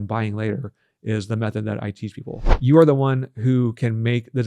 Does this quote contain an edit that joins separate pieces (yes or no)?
yes